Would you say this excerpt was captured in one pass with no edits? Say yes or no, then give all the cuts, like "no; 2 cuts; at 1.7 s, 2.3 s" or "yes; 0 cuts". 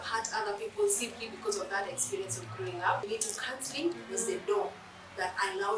no; 1 cut; at 3.1 s